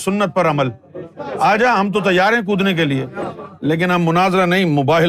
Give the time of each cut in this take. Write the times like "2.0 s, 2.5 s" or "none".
3.4 s